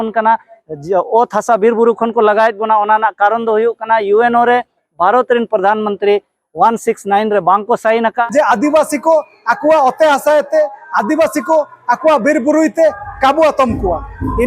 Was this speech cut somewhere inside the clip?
yes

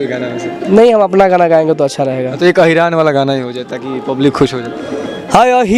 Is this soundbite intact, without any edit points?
yes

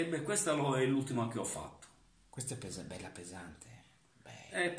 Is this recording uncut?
yes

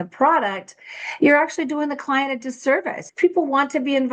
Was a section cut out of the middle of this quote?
yes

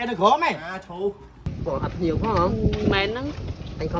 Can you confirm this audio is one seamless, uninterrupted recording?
no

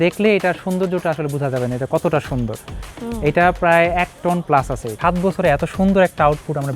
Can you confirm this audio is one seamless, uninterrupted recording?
yes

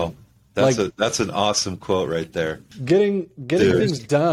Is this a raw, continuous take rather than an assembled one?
no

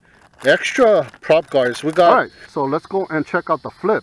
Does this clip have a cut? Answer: yes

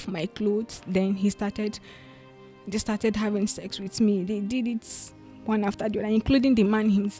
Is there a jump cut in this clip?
no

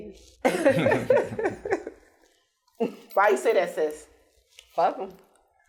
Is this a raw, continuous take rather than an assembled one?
yes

